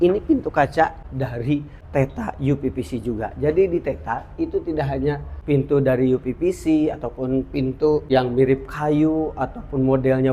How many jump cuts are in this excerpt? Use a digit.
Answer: 3